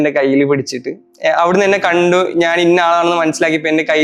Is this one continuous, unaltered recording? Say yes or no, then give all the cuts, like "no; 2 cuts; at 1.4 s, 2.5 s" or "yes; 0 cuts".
yes; 0 cuts